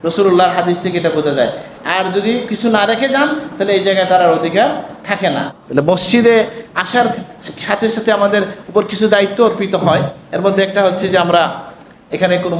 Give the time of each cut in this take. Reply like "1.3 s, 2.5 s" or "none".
5.6 s